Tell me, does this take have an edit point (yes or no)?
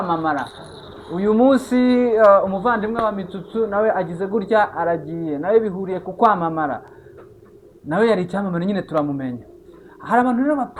no